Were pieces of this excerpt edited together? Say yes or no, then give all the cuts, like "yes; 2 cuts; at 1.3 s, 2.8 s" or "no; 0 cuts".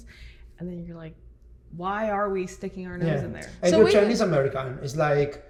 no; 0 cuts